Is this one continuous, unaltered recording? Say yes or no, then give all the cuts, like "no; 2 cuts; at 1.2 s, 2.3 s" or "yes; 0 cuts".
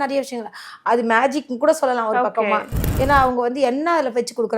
no; 1 cut; at 2.8 s